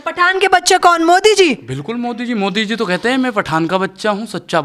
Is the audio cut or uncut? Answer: uncut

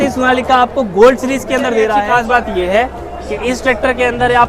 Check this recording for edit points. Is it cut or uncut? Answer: cut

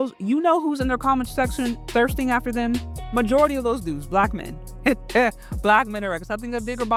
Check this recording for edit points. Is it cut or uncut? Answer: uncut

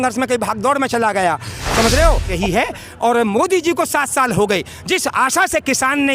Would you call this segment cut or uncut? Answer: cut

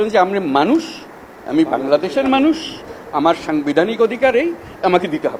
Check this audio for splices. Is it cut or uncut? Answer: uncut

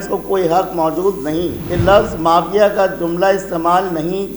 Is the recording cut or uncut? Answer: cut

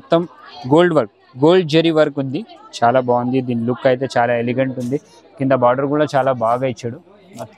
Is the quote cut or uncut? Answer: uncut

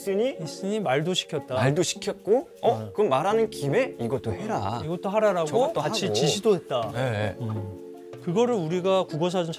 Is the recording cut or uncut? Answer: cut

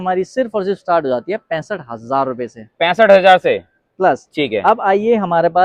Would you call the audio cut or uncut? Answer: uncut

